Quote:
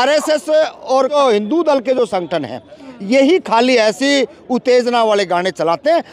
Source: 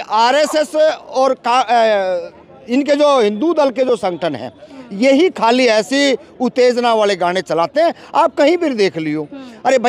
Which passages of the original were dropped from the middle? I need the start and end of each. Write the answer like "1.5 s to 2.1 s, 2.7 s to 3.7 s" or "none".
1.4 s to 3.0 s